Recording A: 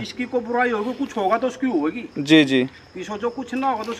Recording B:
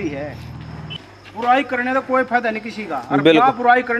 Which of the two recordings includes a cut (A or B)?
B